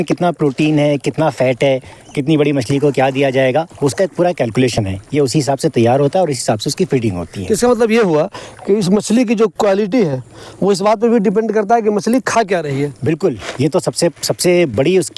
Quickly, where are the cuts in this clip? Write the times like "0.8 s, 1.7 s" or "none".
none